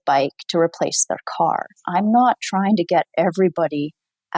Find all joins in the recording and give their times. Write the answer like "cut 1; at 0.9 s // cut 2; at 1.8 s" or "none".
cut 1; at 1.8 s